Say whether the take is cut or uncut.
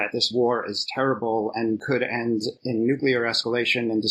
uncut